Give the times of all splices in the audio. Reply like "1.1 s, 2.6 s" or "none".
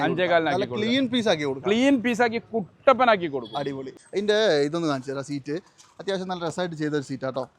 4.0 s